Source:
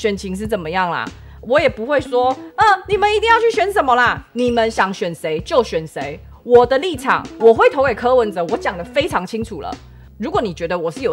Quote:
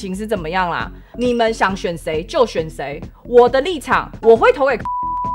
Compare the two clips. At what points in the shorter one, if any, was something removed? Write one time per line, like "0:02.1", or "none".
0:01.1